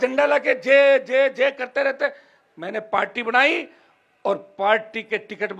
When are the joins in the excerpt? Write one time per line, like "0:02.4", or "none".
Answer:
none